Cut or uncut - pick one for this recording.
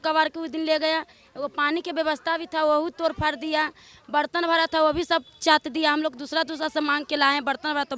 uncut